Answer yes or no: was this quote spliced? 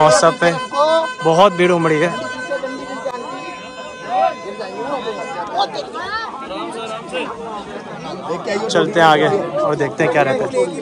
no